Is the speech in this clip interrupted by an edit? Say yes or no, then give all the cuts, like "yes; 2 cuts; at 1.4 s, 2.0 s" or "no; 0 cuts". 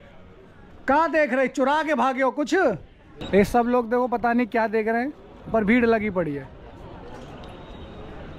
yes; 1 cut; at 3.1 s